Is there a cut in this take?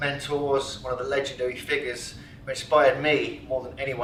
no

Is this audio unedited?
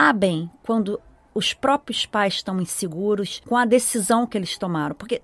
no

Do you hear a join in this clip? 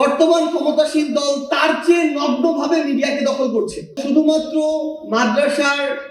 yes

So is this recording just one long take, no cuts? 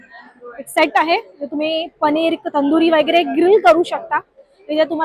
yes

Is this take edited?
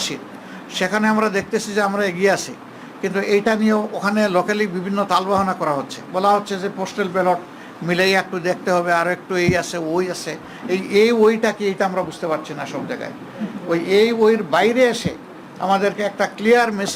no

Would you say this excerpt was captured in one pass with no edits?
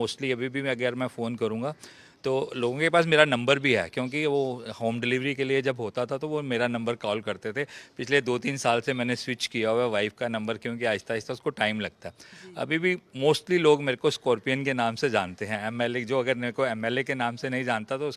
yes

